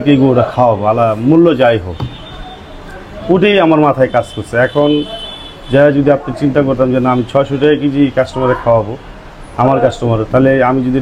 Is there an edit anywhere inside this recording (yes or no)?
no